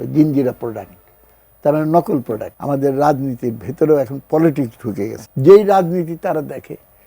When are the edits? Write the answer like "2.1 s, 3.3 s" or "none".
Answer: 2.5 s, 5.1 s